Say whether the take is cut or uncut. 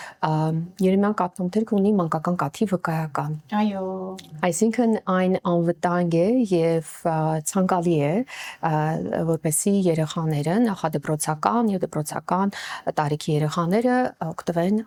uncut